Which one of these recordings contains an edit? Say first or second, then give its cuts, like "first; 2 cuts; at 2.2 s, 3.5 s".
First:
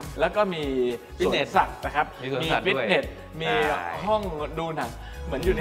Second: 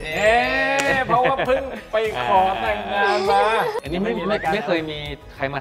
second; 1 cut; at 3.8 s